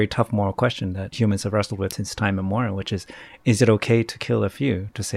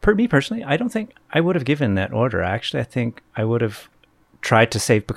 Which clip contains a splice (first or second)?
first